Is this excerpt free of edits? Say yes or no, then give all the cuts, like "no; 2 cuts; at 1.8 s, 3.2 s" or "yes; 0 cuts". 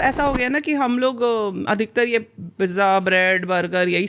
yes; 0 cuts